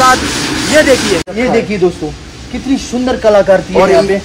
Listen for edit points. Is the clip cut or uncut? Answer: cut